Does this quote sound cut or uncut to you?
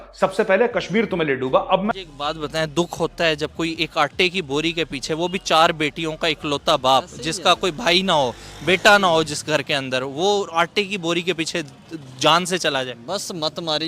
cut